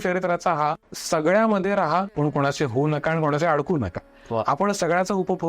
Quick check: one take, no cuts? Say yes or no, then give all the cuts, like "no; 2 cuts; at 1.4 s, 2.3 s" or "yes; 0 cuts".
no; 2 cuts; at 0.9 s, 2.1 s